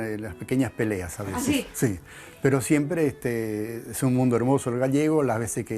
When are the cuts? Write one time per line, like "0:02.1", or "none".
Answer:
none